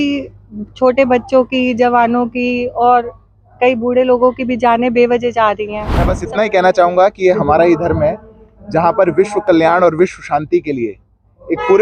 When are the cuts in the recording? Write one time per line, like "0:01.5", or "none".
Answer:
0:06.2